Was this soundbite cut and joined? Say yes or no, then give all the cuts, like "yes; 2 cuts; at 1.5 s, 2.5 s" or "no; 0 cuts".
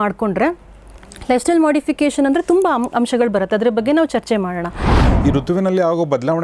yes; 1 cut; at 5.0 s